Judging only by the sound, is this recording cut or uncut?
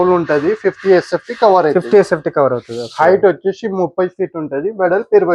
uncut